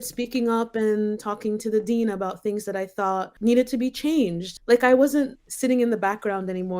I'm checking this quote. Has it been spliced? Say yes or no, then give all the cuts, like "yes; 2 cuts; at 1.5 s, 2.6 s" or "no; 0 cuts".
yes; 3 cuts; at 3.3 s, 4.5 s, 5.4 s